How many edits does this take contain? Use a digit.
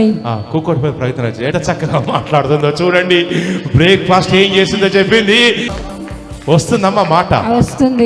2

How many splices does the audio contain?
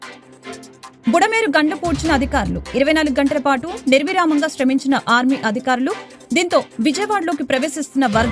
1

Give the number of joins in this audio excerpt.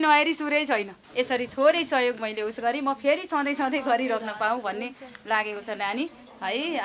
1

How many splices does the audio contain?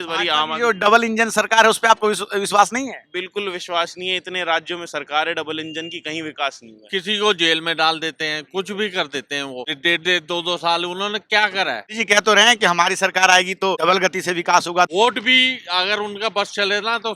5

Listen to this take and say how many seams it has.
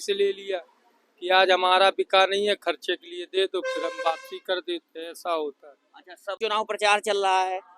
1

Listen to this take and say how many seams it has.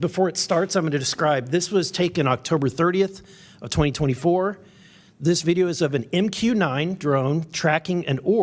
1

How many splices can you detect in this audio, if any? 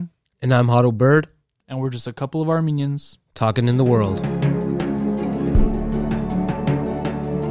1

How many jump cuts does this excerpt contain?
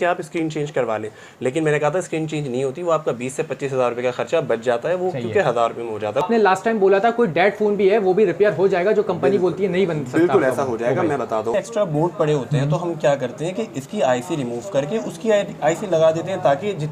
2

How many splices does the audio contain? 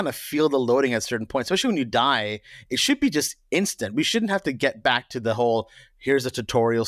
0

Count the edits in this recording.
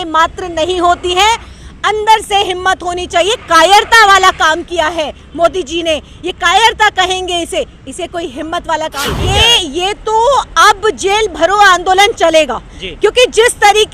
1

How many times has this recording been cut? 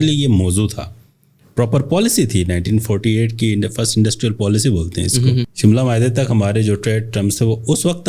1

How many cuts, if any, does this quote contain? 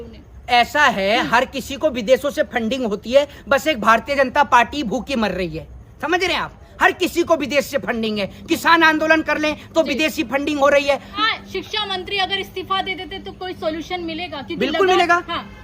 1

